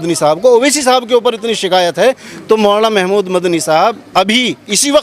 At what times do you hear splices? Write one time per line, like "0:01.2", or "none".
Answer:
none